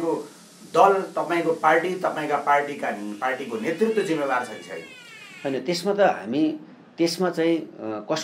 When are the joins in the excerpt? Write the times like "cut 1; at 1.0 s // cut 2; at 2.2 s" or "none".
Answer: none